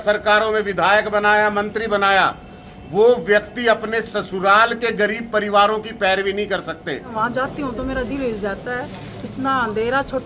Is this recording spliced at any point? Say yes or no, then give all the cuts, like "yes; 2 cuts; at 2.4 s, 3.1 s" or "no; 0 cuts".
yes; 1 cut; at 7.1 s